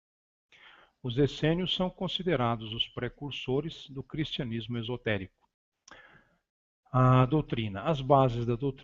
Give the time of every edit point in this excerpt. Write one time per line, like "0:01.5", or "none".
0:04.2